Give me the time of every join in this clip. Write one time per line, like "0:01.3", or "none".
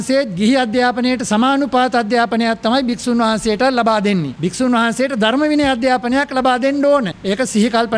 0:04.3
0:07.1